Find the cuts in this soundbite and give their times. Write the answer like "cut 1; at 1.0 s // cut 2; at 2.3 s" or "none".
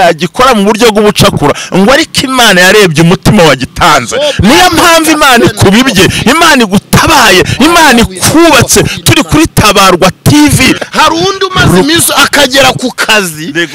cut 1; at 10.8 s

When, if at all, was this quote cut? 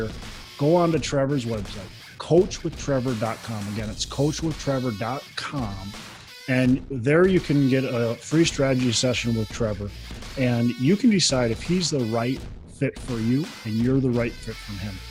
none

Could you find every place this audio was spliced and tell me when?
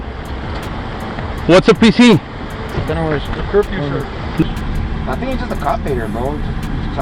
cut 1; at 4.4 s

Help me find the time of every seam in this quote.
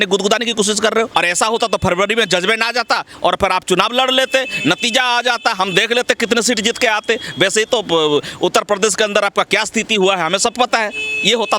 cut 1; at 1.1 s

